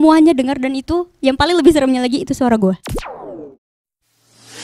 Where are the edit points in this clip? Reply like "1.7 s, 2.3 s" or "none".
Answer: 2.9 s